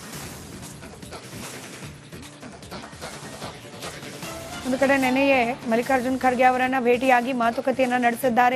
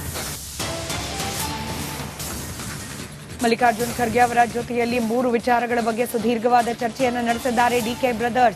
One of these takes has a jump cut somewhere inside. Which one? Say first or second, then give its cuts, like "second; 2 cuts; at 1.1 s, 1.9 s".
first; 1 cut; at 1.1 s